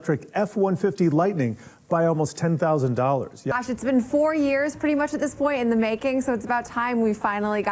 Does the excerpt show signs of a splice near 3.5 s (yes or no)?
yes